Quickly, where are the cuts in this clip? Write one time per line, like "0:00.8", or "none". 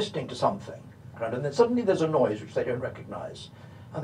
0:01.2